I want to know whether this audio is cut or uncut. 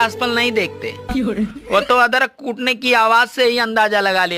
uncut